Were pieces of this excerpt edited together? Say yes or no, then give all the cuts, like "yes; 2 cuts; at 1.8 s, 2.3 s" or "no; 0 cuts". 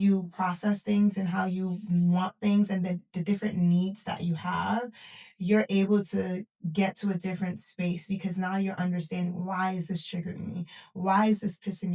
no; 0 cuts